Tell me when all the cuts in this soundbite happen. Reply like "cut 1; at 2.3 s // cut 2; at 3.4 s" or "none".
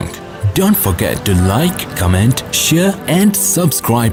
none